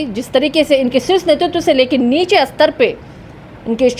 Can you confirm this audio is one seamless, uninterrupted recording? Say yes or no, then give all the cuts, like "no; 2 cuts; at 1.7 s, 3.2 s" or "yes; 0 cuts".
yes; 0 cuts